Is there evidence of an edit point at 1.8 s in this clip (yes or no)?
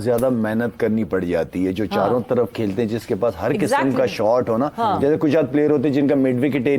no